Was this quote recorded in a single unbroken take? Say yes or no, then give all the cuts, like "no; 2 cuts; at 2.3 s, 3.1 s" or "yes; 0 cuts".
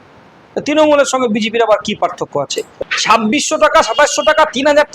no; 1 cut; at 2.7 s